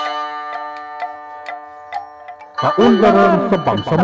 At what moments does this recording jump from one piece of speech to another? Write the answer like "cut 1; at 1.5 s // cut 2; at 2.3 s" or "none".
cut 1; at 2.6 s